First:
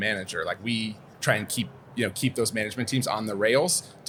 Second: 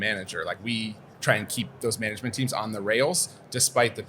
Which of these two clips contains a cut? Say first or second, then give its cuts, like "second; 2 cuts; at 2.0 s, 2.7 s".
second; 1 cut; at 1.8 s